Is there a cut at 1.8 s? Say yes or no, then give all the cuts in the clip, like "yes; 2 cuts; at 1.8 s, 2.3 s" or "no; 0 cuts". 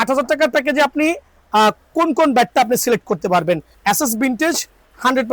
no; 1 cut; at 3.7 s